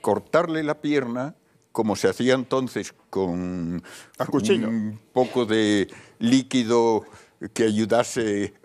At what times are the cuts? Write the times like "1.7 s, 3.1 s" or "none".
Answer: 5.3 s